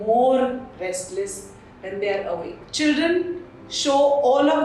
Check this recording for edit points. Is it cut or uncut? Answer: cut